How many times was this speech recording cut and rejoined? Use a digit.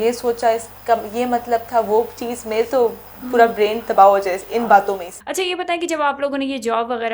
1